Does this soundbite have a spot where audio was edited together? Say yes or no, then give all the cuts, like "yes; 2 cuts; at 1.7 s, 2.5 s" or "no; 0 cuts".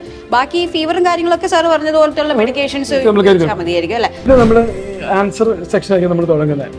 yes; 1 cut; at 4.3 s